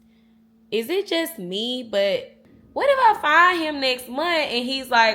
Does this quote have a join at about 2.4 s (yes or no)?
yes